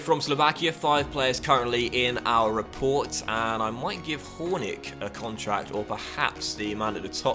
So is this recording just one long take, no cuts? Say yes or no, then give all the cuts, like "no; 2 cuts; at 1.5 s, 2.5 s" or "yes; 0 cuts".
yes; 0 cuts